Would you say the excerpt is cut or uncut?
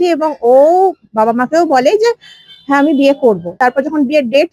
cut